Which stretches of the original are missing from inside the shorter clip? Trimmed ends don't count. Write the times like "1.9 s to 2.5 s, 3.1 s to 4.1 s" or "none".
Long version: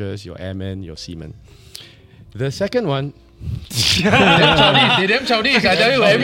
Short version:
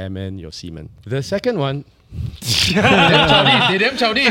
1.4 s to 2.2 s